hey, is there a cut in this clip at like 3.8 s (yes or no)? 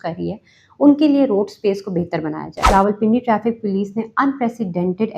no